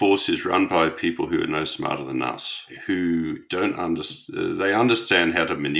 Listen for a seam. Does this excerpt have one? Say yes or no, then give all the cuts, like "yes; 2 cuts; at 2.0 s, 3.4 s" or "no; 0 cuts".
yes; 1 cut; at 2.7 s